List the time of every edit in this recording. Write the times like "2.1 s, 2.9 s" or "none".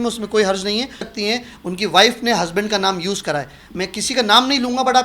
1.1 s